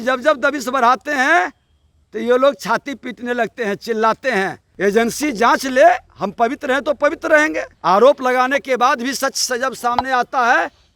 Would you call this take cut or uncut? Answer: cut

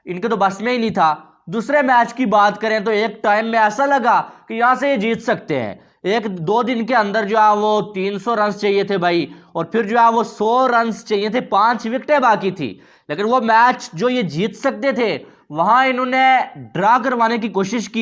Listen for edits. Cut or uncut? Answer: uncut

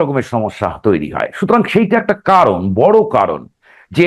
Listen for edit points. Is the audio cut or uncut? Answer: uncut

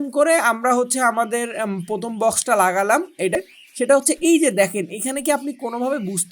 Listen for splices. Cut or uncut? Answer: cut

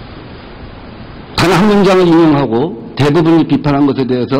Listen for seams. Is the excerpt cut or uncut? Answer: cut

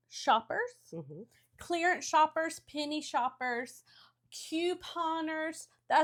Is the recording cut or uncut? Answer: uncut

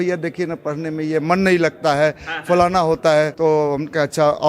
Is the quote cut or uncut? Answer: cut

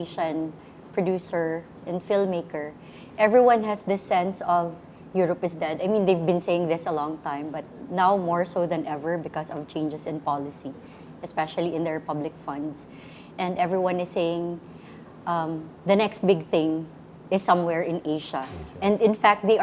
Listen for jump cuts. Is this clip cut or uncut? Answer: uncut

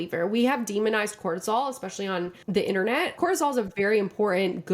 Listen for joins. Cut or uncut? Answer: cut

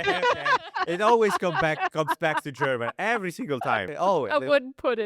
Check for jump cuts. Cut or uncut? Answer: cut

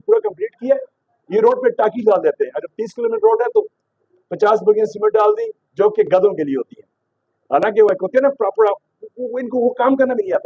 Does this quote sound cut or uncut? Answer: uncut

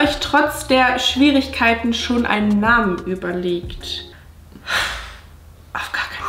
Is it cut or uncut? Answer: uncut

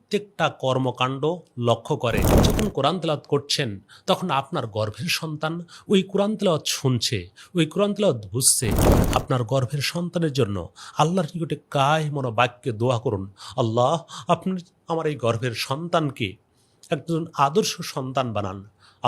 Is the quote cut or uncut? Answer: cut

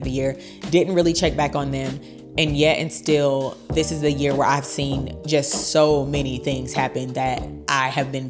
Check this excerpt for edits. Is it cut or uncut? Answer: uncut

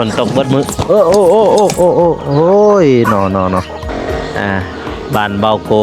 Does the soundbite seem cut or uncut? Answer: cut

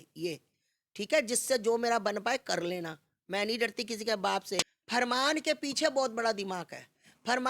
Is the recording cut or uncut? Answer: cut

